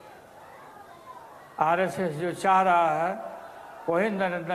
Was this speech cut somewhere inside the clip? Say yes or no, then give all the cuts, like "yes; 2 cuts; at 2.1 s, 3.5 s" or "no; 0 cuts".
no; 0 cuts